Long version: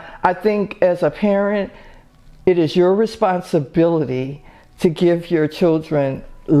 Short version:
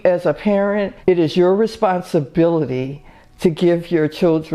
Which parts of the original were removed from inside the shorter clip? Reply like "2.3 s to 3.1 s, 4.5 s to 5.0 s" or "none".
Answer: 1.7 s to 2.3 s